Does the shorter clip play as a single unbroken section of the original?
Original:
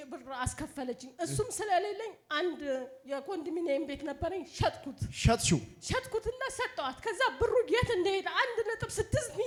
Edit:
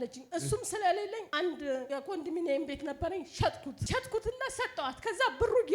no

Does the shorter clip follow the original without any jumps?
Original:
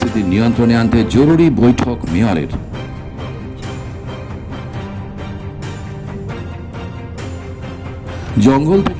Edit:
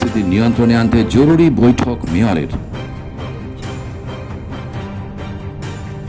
yes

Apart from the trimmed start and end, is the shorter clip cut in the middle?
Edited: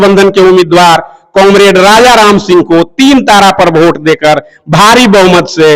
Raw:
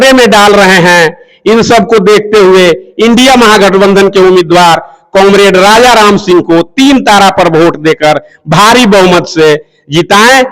no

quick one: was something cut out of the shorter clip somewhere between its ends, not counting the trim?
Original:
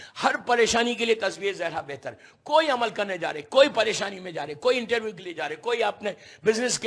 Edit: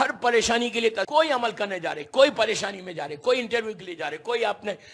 yes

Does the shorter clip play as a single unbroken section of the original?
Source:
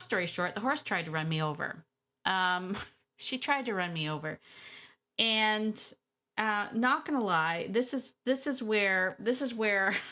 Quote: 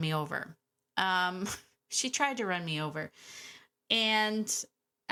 yes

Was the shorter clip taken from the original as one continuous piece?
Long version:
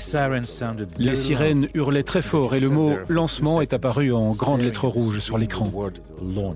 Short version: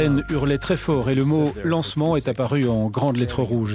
yes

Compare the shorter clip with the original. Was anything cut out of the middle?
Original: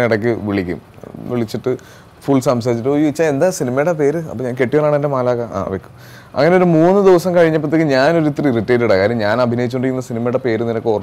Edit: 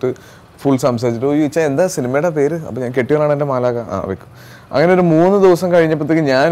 no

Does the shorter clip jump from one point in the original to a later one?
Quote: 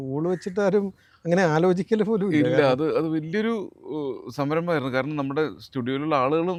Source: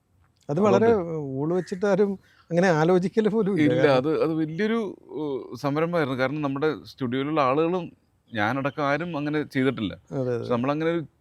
no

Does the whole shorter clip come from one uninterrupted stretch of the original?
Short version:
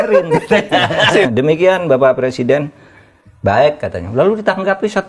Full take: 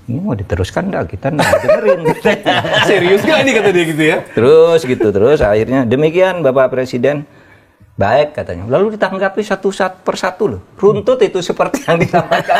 no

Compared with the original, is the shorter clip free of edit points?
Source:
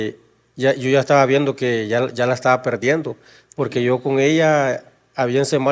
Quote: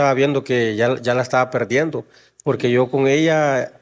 yes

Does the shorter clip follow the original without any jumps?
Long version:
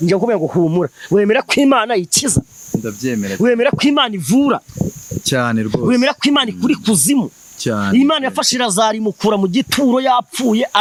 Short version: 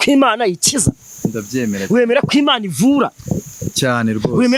yes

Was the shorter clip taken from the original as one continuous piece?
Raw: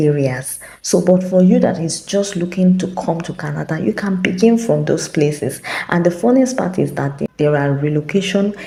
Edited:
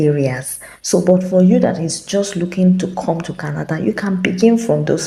yes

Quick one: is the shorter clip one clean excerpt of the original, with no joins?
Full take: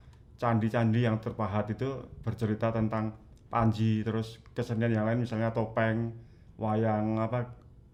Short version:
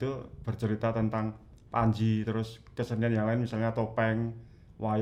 yes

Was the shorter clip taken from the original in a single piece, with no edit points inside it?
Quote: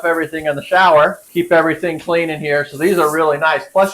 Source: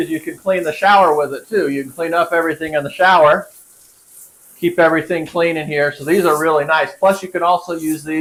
no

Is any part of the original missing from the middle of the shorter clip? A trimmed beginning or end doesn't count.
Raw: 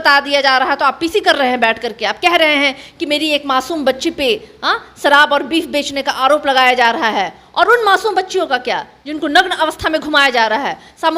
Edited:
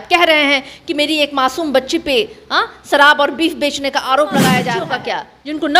yes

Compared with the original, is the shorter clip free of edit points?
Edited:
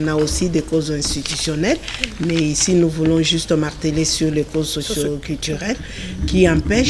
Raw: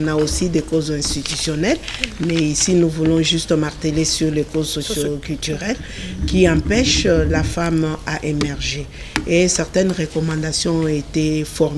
yes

